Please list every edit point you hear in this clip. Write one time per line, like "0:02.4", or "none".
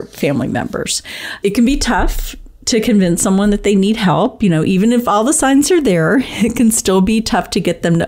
none